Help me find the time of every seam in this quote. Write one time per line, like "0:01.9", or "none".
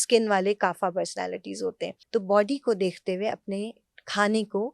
0:01.9